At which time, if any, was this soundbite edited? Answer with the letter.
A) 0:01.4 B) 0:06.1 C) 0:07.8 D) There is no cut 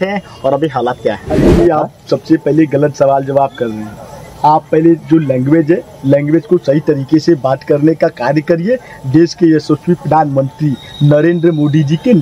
A